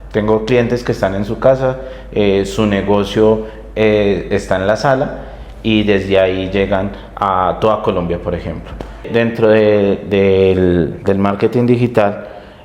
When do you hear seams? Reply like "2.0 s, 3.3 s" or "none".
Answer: 9.1 s